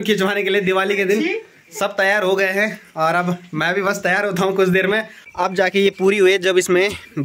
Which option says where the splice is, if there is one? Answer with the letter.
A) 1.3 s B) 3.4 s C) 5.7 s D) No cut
C